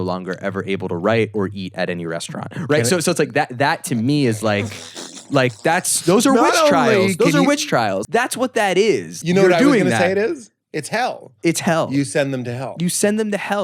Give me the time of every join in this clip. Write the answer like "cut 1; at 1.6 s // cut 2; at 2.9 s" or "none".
cut 1; at 8.0 s // cut 2; at 9.1 s